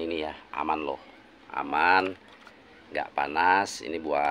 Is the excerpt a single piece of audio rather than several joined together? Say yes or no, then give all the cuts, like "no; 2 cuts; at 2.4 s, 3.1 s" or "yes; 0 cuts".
yes; 0 cuts